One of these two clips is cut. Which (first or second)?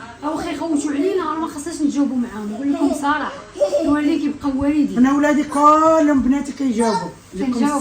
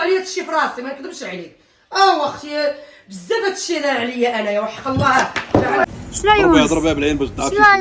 second